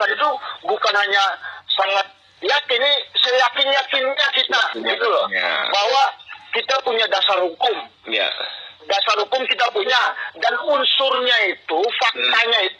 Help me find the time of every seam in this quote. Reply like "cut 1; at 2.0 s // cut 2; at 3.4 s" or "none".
none